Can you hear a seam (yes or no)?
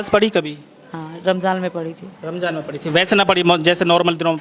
no